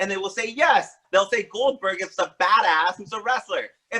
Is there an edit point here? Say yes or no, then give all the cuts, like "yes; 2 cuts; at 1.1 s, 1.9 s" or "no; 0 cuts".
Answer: yes; 1 cut; at 1.0 s